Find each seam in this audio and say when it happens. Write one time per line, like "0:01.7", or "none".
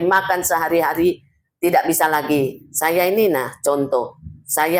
none